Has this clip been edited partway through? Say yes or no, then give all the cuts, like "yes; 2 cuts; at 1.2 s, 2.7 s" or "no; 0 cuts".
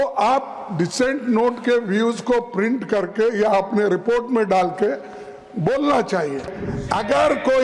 yes; 1 cut; at 6.6 s